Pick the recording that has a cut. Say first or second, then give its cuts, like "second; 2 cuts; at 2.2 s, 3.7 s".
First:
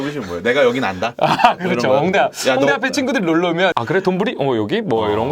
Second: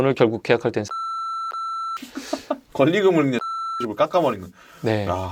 first; 1 cut; at 3.8 s